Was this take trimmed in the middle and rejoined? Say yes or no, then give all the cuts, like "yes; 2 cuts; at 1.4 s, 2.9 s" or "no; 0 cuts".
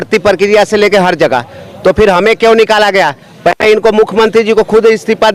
no; 0 cuts